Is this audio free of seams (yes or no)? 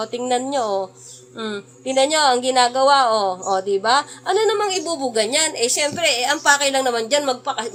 yes